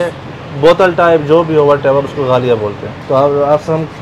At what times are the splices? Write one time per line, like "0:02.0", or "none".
0:02.9